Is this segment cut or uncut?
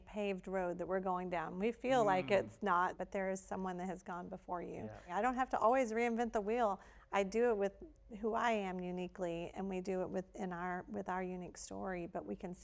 cut